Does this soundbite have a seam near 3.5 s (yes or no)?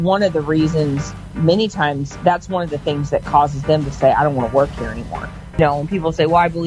no